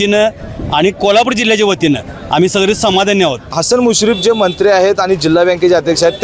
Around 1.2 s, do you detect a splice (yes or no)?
no